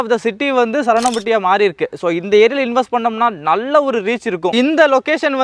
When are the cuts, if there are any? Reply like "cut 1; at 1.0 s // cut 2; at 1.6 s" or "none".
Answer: cut 1; at 4.5 s